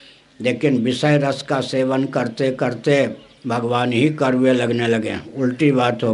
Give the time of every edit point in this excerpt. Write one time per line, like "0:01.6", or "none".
none